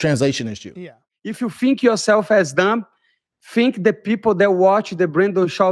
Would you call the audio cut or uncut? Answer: cut